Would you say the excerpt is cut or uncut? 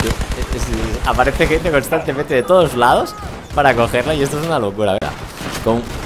cut